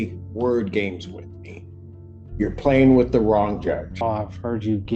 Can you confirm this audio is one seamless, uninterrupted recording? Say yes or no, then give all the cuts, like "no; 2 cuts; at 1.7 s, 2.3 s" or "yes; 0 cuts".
no; 1 cut; at 4.0 s